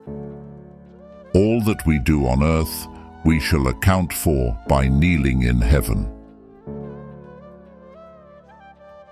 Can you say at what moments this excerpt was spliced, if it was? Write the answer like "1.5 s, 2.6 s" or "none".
none